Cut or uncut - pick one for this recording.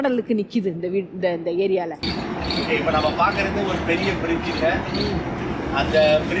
cut